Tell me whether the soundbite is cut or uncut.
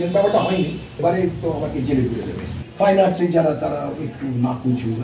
cut